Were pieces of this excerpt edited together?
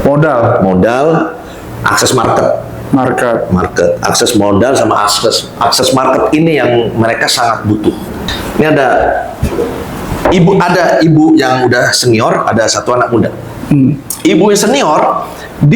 yes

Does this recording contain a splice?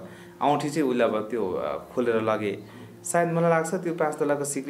no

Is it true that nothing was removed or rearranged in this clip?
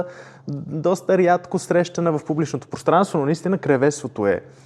yes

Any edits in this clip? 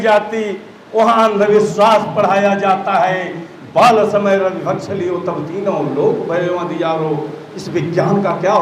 no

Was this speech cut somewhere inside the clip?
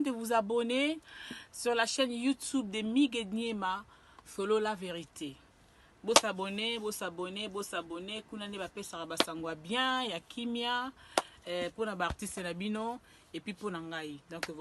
no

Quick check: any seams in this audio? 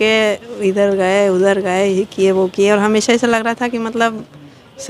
no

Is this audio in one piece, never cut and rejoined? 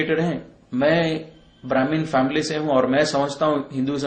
yes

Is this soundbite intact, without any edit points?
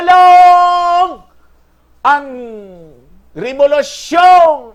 yes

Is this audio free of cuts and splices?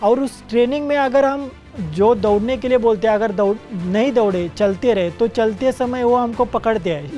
yes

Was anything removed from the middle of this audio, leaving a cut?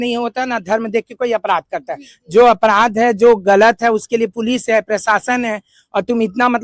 no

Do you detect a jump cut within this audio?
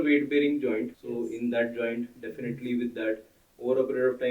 yes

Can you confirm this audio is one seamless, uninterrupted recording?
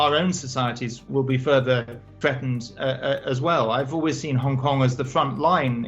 no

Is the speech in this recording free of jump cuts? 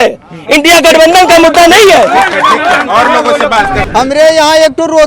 no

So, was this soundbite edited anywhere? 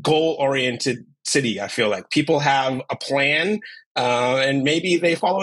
no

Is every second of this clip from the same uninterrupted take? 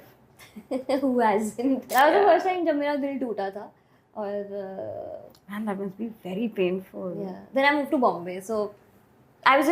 no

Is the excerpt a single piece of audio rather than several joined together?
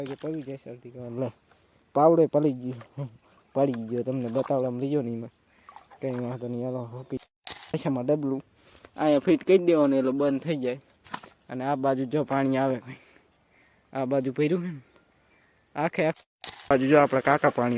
no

